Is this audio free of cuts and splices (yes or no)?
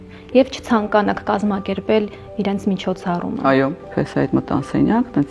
no